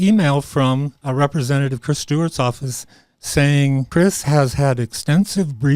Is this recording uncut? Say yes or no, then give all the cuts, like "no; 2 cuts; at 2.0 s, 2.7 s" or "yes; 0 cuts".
no; 2 cuts; at 1.0 s, 3.9 s